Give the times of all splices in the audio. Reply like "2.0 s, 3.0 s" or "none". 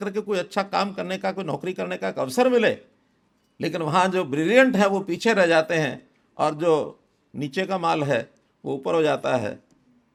none